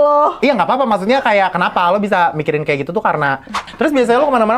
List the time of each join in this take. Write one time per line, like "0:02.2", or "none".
0:03.7

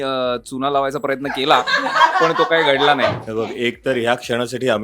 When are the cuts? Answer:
0:03.2

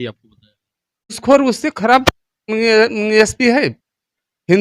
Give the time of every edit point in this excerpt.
0:01.2

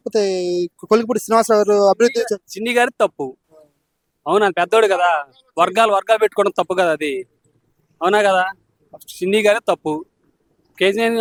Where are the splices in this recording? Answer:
none

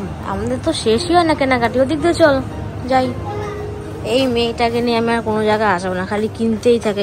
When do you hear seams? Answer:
none

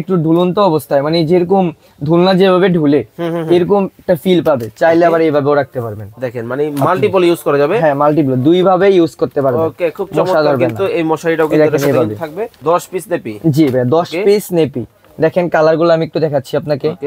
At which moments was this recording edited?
0:12.5

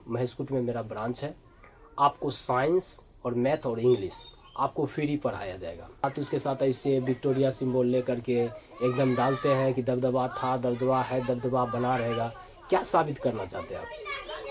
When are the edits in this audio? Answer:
0:06.0

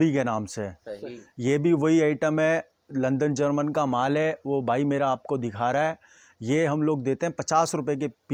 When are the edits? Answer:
none

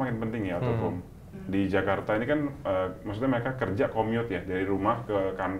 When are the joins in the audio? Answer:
0:01.2

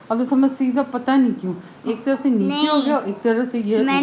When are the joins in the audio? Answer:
none

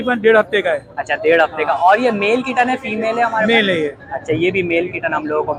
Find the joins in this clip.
none

